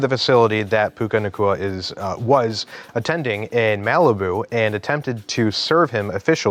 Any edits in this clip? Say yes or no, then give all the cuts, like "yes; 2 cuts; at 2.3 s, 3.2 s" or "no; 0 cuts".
no; 0 cuts